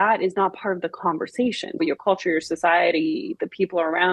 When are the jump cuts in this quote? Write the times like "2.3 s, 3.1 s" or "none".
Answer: 1.8 s